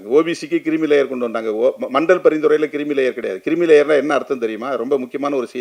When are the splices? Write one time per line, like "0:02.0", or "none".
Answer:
none